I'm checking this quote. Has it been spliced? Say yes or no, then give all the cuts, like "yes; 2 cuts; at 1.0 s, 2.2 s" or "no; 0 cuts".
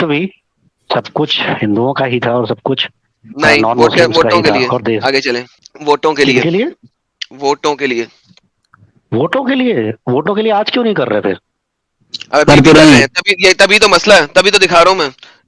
no; 0 cuts